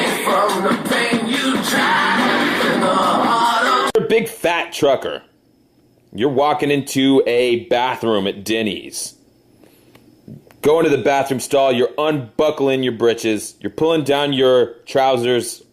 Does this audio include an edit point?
yes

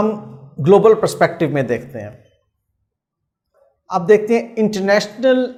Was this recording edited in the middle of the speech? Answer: no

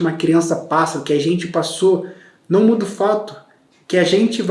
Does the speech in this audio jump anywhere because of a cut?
no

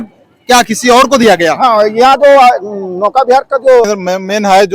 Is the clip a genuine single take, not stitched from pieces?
no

